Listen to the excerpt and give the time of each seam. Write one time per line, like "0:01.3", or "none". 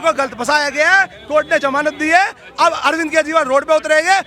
none

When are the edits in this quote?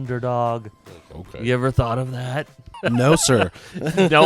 0:02.8

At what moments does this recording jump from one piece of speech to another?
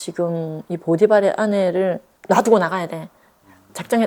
none

